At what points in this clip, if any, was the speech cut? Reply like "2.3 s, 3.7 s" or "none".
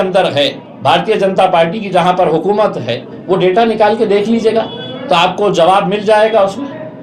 none